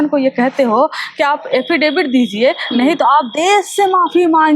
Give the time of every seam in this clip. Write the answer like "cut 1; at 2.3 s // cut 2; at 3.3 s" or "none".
none